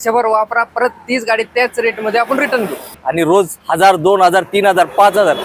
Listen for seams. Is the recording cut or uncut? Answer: cut